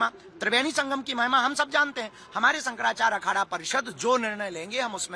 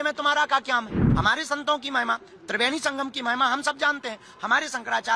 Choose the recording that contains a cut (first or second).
second